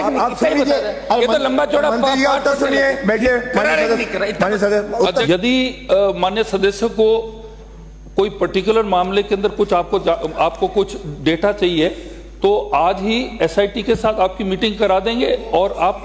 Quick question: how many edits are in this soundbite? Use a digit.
1